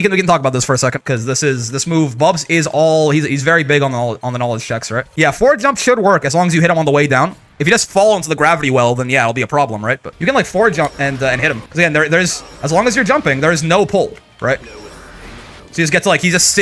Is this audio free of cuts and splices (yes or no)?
no